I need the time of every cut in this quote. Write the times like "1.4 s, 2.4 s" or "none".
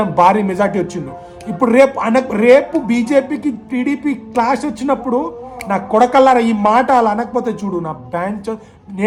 none